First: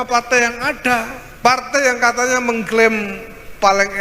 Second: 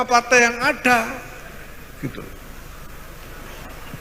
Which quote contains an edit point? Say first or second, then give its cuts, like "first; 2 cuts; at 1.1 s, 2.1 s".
first; 1 cut; at 1.2 s